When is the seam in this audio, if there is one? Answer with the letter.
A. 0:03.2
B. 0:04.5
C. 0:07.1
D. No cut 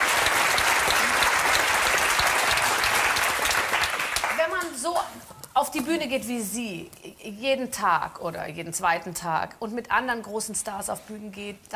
B